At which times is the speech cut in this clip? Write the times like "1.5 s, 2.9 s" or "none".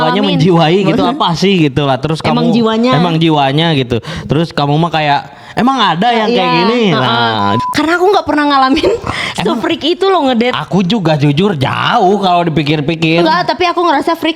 7.6 s